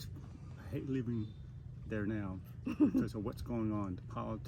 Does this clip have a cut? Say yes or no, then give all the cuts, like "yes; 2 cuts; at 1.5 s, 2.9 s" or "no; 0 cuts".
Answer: no; 0 cuts